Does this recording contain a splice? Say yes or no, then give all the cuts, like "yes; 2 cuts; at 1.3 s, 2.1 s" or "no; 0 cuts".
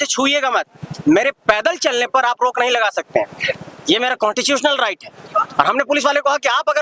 no; 0 cuts